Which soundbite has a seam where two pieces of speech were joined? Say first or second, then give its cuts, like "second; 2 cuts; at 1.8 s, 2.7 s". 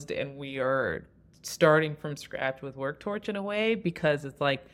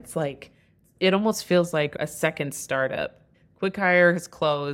second; 1 cut; at 3.2 s